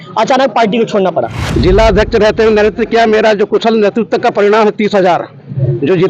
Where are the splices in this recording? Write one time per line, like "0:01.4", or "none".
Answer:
0:01.4